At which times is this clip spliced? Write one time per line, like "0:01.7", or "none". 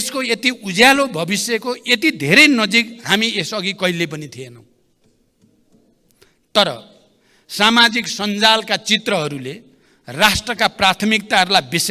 none